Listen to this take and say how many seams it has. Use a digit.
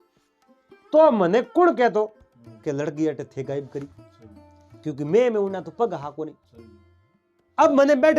1